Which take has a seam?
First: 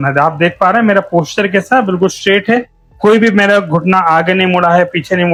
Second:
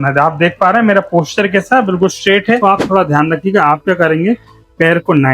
second; 1 cut; at 2.6 s

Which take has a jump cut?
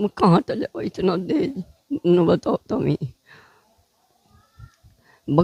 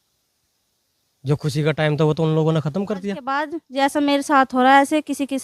second; 1 cut; at 3.6 s

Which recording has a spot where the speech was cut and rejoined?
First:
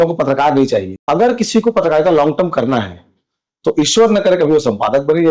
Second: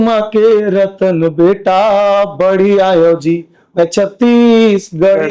first; 1 cut; at 0.9 s

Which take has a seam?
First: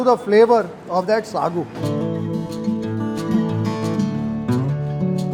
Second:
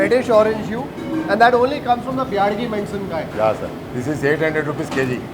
second; 1 cut; at 3.8 s

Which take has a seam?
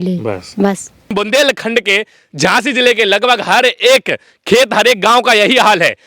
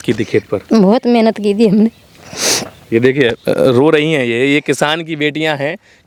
first; 1 cut; at 1.1 s

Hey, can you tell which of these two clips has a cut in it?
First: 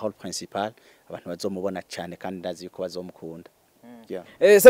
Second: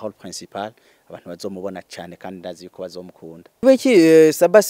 second; 1 cut; at 3.6 s

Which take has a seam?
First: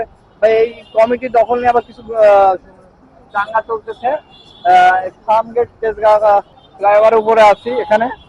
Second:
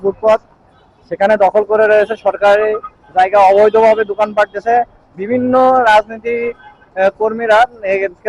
first; 1 cut; at 6.6 s

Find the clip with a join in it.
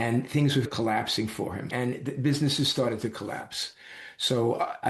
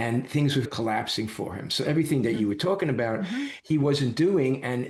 first; 1 cut; at 1.7 s

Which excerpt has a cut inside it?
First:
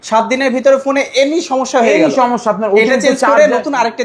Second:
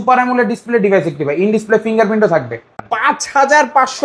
second; 1 cut; at 2.8 s

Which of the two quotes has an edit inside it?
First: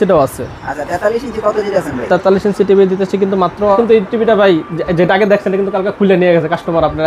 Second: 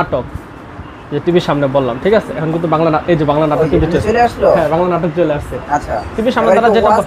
first; 1 cut; at 3.8 s

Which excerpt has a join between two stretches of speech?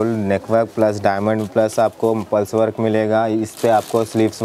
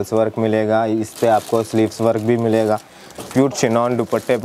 second; 1 cut; at 3.2 s

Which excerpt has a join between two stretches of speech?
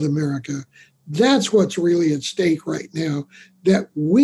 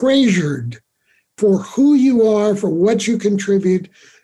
second; 1 cut; at 1.3 s

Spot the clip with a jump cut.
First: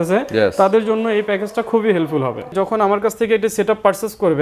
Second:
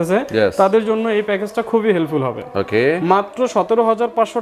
first; 1 cut; at 2.5 s

